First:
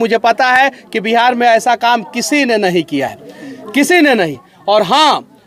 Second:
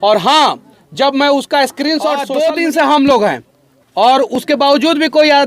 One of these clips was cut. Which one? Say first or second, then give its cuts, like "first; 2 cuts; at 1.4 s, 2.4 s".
second; 1 cut; at 2.2 s